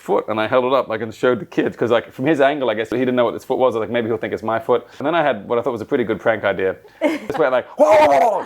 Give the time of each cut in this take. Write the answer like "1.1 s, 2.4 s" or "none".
2.9 s, 5.0 s, 7.3 s